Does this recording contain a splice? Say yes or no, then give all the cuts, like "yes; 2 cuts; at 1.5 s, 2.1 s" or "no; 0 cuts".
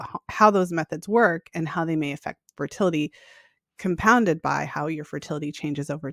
no; 0 cuts